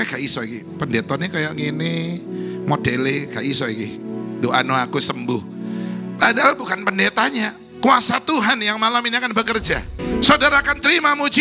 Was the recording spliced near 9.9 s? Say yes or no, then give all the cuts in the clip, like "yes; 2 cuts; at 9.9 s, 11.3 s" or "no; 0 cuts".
yes; 1 cut; at 9.9 s